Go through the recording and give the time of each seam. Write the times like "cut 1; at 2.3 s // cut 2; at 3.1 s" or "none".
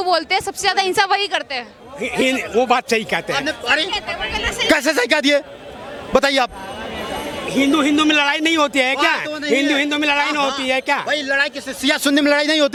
none